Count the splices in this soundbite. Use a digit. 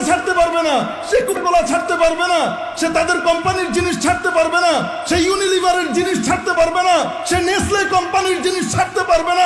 1